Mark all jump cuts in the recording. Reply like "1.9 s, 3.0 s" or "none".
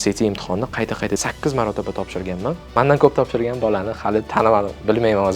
1.2 s, 2.6 s